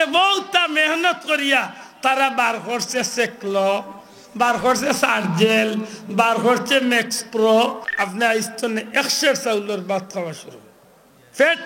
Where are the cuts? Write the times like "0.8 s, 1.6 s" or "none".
7.9 s